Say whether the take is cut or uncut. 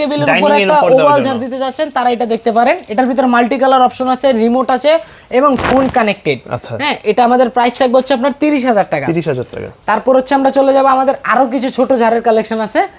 uncut